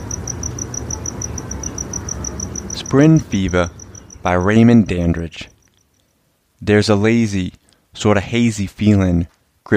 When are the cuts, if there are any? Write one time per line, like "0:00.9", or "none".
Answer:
0:02.8

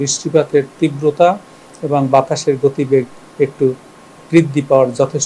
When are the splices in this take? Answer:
none

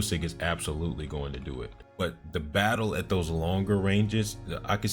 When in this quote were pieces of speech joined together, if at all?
0:01.8

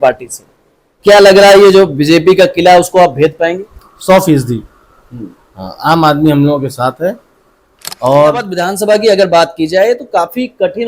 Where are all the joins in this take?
0:08.5

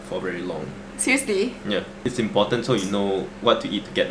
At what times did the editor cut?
0:01.9
0:03.3

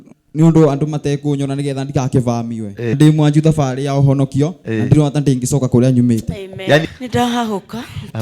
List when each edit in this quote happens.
0:03.0
0:06.9

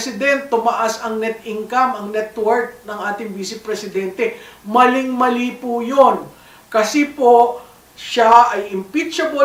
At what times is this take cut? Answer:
none

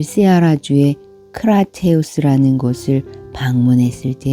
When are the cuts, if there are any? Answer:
none

